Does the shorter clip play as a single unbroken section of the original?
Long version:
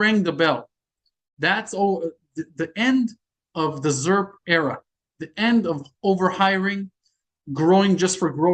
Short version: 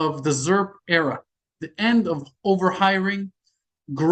yes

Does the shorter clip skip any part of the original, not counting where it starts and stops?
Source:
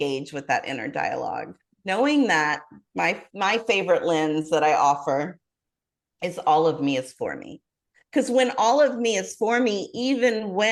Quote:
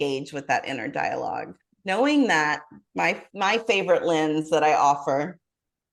no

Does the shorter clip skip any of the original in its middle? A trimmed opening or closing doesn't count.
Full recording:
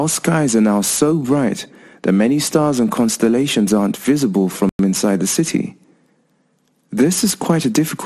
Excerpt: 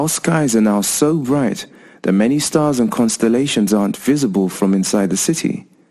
yes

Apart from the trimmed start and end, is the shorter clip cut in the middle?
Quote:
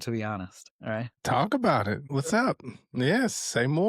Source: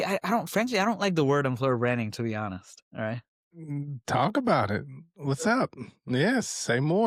yes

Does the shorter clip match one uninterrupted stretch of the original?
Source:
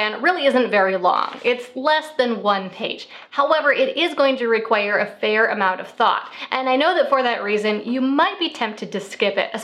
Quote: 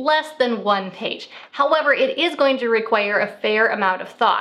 yes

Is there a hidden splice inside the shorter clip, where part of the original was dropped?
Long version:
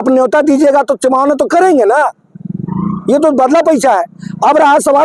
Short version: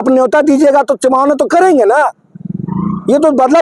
no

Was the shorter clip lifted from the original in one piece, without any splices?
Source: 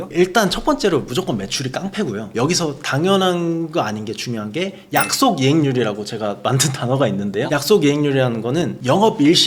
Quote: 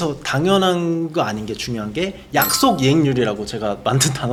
yes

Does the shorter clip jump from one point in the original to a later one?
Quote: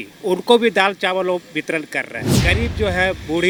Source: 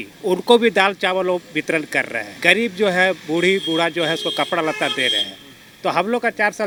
no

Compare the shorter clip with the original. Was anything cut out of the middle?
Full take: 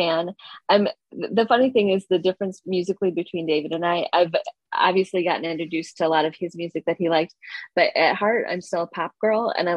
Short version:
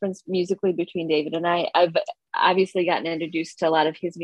no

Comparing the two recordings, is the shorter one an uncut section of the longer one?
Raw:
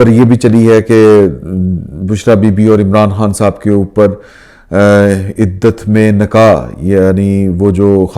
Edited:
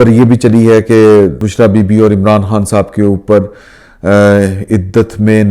no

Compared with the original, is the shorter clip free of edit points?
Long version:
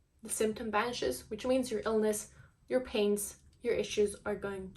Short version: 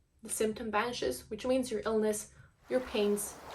yes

